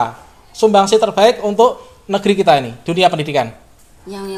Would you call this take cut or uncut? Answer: uncut